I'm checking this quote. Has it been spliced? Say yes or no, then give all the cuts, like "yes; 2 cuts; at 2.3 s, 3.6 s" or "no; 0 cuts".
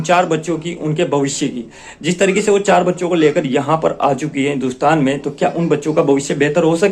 no; 0 cuts